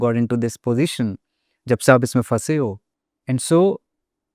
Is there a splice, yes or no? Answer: no